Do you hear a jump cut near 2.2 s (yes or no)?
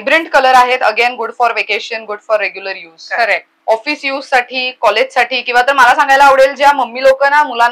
no